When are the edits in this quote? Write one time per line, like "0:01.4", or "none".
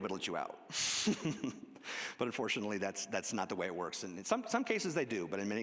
none